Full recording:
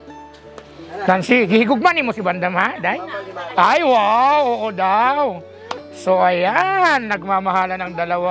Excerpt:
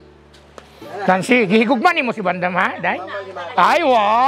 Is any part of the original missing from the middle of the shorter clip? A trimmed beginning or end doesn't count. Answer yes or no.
no